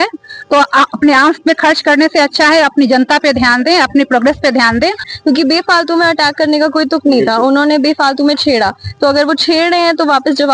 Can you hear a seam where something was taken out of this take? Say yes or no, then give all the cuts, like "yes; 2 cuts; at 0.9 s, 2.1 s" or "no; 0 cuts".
yes; 1 cut; at 5.1 s